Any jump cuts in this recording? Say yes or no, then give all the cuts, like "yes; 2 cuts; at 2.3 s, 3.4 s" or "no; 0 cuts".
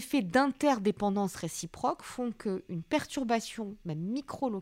no; 0 cuts